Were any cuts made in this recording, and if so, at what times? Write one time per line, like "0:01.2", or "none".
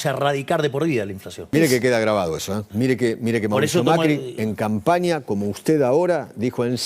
0:01.5
0:02.7